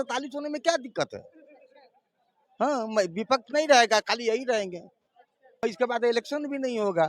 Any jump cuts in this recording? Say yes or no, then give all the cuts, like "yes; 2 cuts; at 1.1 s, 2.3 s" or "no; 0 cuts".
yes; 1 cut; at 5.6 s